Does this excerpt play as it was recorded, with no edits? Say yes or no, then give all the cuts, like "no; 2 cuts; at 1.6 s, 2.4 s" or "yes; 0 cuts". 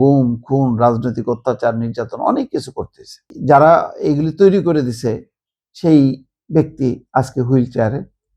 no; 1 cut; at 3.3 s